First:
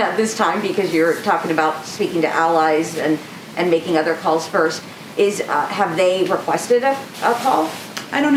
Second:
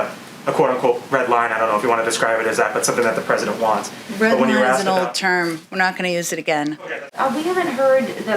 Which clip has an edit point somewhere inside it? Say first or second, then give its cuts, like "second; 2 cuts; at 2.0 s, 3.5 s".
second; 1 cut; at 7.1 s